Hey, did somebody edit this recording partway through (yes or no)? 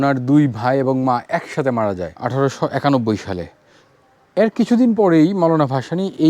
yes